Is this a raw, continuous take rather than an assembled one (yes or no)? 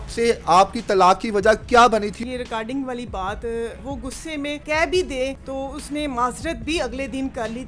no